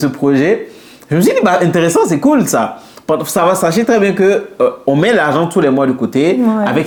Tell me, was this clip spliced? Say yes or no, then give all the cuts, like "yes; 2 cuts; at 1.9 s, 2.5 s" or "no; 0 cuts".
no; 0 cuts